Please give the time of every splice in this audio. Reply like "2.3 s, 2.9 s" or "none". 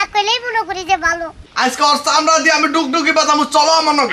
1.3 s